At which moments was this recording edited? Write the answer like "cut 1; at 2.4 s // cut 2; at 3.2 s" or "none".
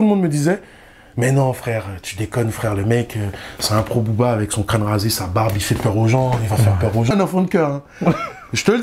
cut 1; at 7.1 s